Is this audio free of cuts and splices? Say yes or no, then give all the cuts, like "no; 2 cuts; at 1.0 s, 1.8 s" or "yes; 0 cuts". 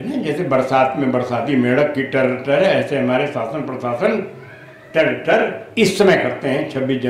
yes; 0 cuts